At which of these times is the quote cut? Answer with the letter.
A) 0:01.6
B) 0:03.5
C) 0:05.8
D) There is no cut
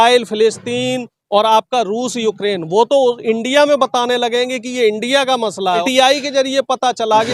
C